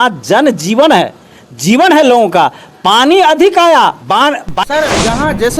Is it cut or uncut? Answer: cut